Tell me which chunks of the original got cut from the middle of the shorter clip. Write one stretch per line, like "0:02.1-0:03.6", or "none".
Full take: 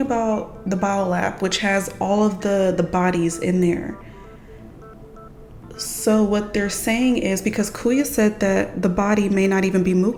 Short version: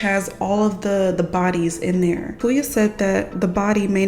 0:03.9-0:07.7

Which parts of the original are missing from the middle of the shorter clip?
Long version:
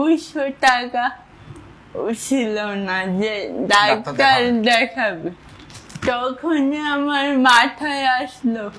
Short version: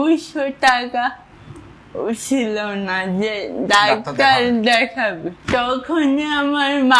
0:05.3-0:05.9

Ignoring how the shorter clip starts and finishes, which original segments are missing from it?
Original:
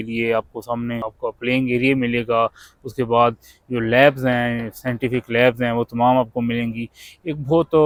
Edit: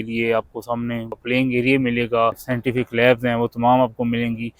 0:01.1-0:01.3
0:02.6-0:04.8

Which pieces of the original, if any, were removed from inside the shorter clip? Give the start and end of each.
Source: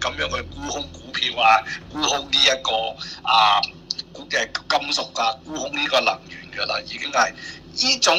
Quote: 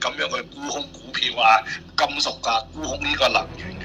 0:01.8-0:04.6

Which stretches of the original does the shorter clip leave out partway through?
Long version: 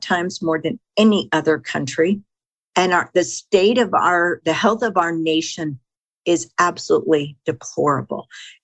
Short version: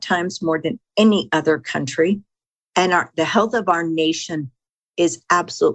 0:03.1-0:04.4

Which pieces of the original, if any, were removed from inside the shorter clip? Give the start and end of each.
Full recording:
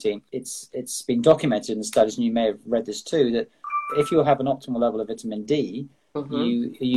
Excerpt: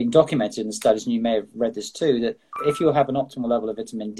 0:03.6-0:03.8

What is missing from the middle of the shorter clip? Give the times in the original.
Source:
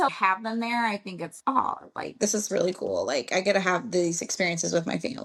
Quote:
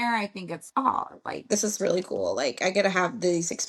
none

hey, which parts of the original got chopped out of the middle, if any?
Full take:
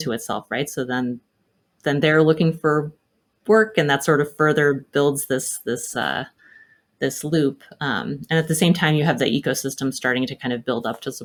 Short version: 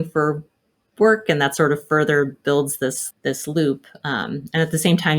0:05.5-0:06.8

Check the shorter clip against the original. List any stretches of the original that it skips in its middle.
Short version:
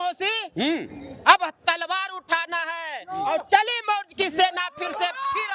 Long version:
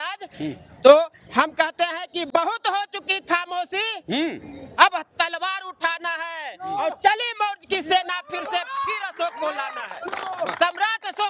none

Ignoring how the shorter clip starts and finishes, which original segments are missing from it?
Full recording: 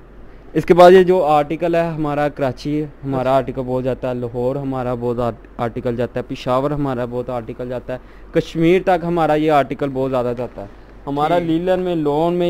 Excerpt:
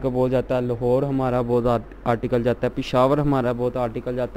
none

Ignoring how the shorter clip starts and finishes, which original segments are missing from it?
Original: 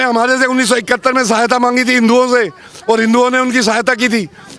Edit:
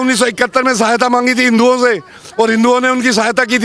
none

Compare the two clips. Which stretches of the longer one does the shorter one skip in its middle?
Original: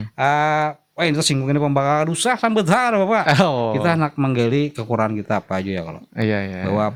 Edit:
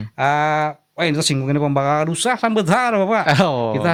none

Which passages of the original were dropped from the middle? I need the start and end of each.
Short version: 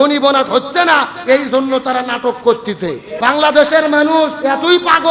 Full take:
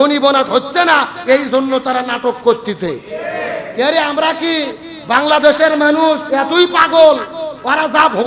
0:03.1-0:04.9

